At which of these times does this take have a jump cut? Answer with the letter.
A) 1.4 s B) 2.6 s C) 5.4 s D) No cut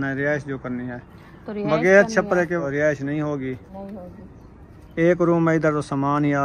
B